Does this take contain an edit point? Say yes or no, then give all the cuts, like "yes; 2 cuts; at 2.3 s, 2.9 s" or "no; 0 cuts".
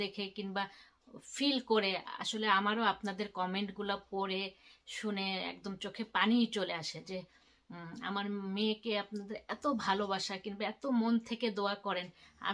no; 0 cuts